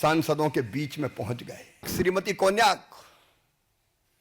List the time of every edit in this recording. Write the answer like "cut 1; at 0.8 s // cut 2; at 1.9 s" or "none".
cut 1; at 1.9 s